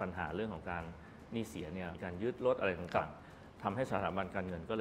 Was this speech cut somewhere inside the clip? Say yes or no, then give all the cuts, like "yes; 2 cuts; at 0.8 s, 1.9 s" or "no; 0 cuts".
no; 0 cuts